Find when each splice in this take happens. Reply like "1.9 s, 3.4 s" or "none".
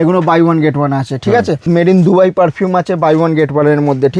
1.6 s